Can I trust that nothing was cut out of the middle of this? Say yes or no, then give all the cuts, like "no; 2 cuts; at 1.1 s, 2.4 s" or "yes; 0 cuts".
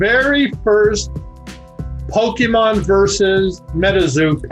yes; 0 cuts